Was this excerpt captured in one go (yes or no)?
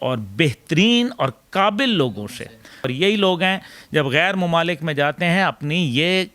no